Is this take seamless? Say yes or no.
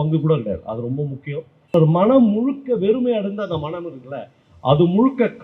no